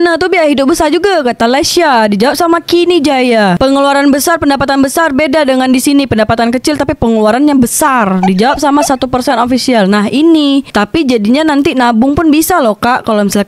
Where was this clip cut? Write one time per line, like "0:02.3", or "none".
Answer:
none